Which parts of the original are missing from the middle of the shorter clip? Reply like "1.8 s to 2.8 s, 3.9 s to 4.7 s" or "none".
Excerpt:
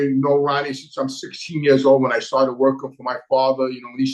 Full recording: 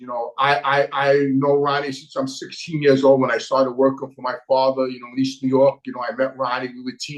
none